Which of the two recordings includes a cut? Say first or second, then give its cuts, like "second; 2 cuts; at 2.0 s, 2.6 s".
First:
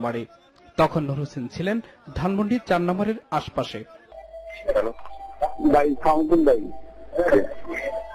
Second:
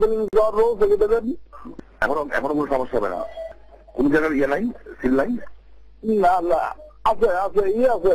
second; 1 cut; at 2.7 s